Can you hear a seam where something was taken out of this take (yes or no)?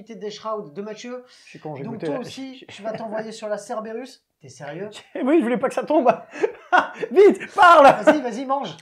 no